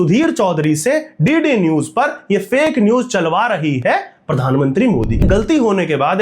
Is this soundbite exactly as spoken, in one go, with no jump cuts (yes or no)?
no